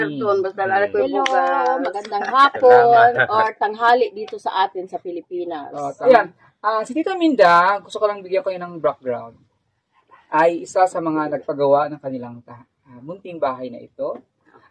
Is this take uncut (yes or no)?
no